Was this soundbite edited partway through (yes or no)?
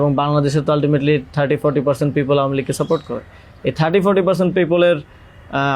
no